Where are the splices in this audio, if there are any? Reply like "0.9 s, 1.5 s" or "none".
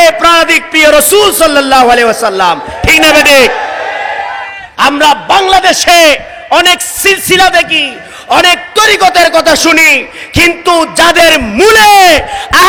none